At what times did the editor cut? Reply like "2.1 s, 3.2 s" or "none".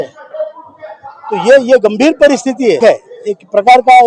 2.8 s